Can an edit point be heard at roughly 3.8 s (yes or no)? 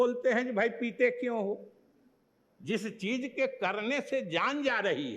no